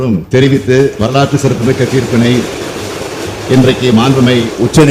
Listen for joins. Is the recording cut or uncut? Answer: uncut